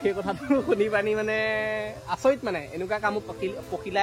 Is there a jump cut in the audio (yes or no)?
no